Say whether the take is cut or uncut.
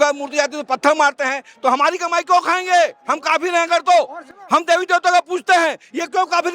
uncut